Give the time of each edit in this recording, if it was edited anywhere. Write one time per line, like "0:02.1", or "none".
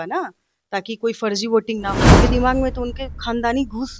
0:02.0